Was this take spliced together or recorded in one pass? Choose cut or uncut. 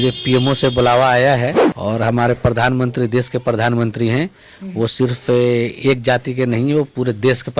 cut